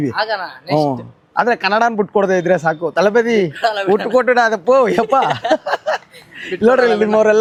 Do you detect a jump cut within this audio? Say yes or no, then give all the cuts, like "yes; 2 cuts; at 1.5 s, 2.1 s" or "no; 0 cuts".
no; 0 cuts